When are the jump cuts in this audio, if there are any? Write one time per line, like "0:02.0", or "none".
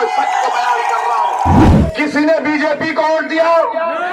0:01.7